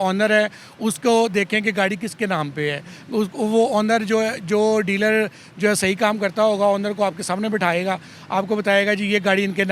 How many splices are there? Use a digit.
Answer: 0